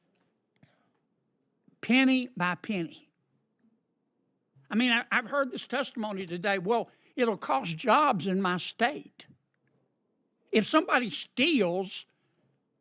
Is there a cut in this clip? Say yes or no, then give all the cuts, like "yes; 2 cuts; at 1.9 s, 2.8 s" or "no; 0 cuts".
no; 0 cuts